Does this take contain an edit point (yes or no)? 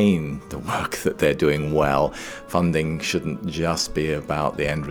no